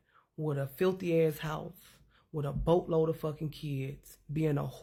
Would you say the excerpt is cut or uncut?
uncut